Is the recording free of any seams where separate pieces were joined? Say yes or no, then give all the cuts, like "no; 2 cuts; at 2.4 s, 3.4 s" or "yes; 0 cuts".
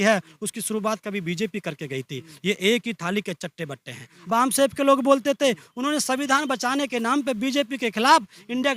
no; 1 cut; at 4.1 s